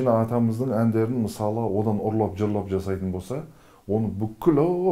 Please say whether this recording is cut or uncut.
uncut